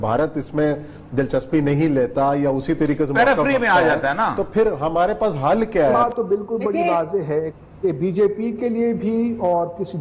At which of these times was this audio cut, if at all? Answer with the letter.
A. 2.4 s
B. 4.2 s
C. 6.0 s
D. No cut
C